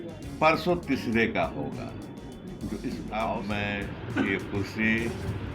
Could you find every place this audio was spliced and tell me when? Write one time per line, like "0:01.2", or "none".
0:03.4